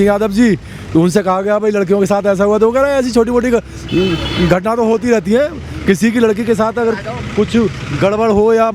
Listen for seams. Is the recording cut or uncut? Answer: uncut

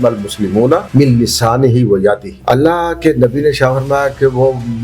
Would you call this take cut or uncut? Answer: cut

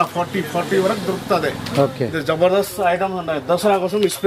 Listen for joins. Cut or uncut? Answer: uncut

